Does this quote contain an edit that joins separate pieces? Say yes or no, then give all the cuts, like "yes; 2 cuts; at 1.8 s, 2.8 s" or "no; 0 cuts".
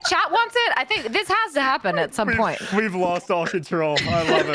no; 0 cuts